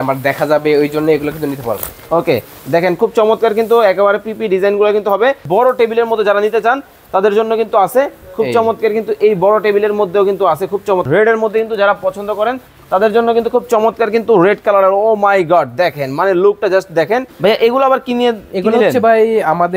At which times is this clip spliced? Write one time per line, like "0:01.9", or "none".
0:05.4
0:11.0
0:17.3